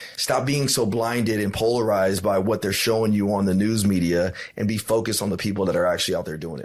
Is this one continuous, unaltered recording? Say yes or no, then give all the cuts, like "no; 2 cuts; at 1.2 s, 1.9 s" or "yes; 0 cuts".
yes; 0 cuts